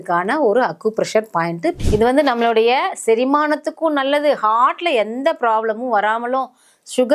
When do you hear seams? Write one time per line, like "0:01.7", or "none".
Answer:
0:01.8

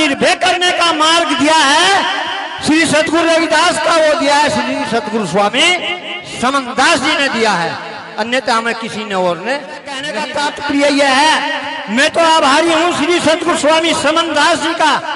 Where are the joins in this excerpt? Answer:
0:10.1

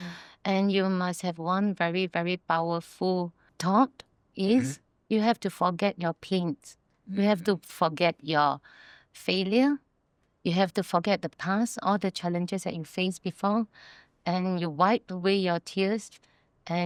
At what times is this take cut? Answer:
none

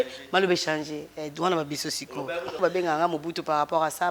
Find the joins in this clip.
0:02.6

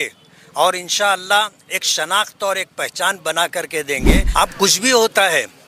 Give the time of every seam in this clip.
0:04.3

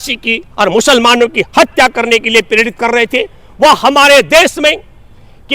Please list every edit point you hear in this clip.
none

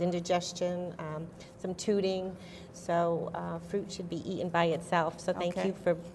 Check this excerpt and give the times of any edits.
none

